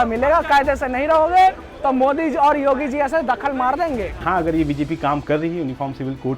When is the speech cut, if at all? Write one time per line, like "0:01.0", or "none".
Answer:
0:04.2